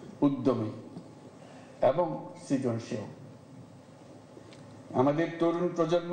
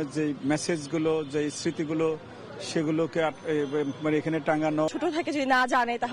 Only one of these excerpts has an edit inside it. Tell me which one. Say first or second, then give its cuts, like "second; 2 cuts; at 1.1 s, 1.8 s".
second; 1 cut; at 4.9 s